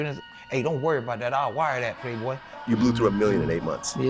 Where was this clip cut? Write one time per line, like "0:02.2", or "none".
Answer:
0:02.5